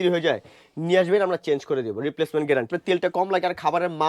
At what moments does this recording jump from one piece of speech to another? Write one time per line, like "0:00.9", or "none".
0:02.7